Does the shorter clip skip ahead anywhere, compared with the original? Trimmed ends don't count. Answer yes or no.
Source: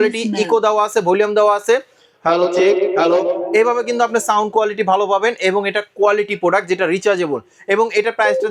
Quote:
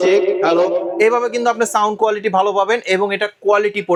no